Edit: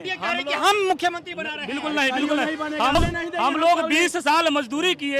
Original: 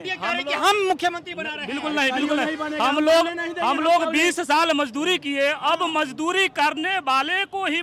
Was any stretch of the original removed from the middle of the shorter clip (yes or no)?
yes